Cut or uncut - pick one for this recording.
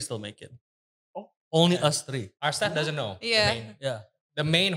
uncut